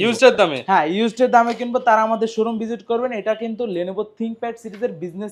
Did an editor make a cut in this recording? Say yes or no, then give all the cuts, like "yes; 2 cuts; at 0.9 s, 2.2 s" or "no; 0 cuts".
no; 0 cuts